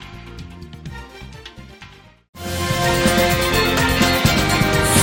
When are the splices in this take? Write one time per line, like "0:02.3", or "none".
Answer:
none